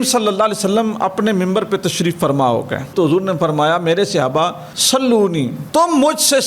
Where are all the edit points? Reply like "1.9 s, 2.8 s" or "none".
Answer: 2.9 s